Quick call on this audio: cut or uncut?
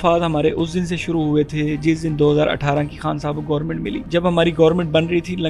cut